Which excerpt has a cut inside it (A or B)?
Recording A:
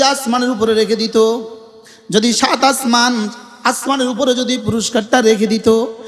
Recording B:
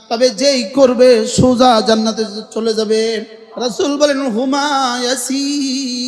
B